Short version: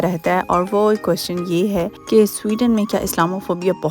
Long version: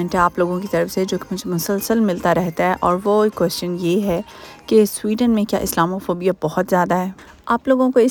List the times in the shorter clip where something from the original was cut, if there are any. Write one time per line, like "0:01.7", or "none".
0:02.0